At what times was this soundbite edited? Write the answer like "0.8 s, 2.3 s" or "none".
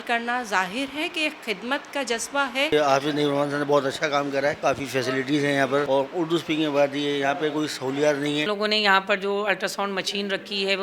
2.7 s, 4.6 s, 5.9 s, 8.5 s